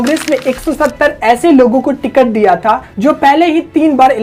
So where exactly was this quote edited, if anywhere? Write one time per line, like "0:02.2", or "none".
none